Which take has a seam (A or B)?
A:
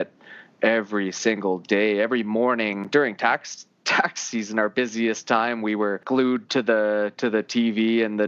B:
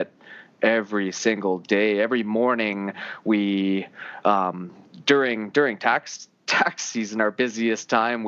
A